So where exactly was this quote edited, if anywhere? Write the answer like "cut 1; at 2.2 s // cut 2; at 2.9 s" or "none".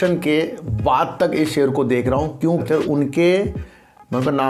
cut 1; at 2.5 s

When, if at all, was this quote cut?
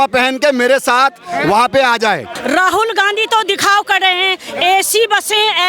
cut 1; at 2.3 s

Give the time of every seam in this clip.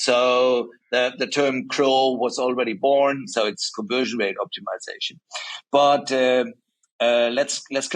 none

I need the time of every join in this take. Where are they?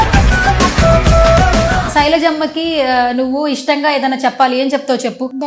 cut 1; at 1.9 s

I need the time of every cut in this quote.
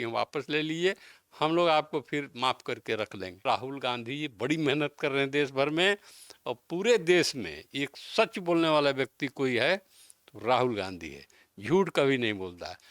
cut 1; at 3.4 s

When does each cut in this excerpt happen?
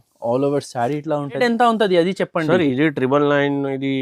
cut 1; at 1.4 s

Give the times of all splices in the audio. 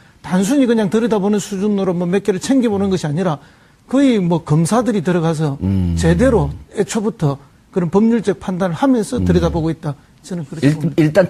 none

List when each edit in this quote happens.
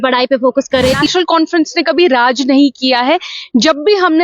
cut 1; at 1.0 s

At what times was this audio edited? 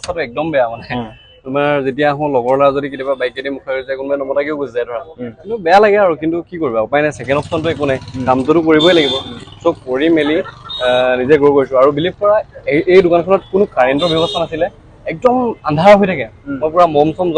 none

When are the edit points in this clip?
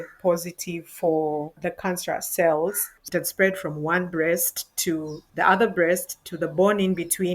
cut 1; at 1.5 s // cut 2; at 2.9 s // cut 3; at 5.2 s

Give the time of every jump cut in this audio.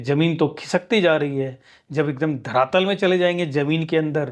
none

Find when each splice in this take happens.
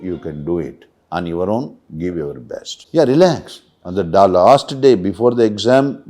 cut 1; at 2.7 s

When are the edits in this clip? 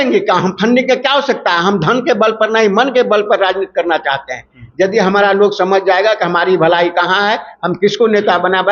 none

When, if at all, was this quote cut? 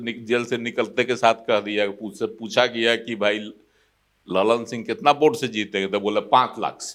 none

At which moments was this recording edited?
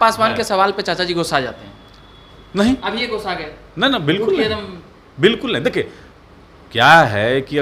none

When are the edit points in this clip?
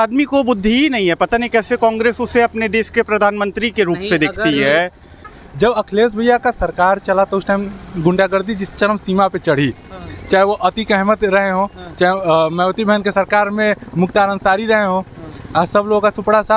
cut 1; at 5.4 s

